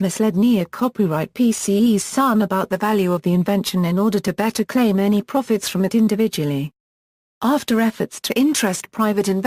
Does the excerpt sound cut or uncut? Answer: uncut